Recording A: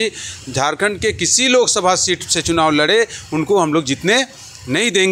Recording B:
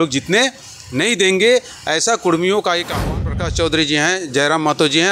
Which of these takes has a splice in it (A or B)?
B